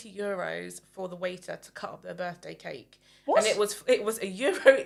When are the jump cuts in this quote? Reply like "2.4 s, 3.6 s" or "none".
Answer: none